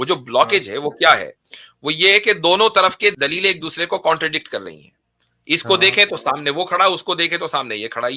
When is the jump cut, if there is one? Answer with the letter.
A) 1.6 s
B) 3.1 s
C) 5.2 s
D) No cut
B